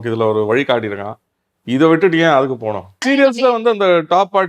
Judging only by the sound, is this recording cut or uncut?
cut